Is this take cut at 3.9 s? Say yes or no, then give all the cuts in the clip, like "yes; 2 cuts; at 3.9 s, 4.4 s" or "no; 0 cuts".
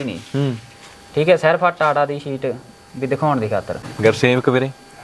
yes; 1 cut; at 3.9 s